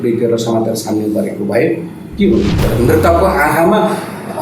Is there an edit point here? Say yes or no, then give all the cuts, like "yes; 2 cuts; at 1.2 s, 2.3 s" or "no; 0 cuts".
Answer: yes; 1 cut; at 2.6 s